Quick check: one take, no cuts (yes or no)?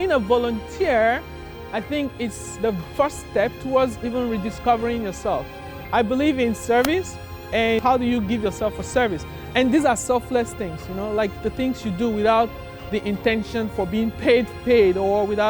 yes